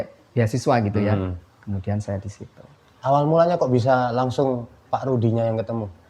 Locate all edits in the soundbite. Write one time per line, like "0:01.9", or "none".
none